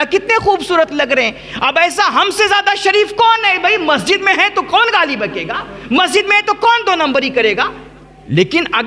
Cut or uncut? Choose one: uncut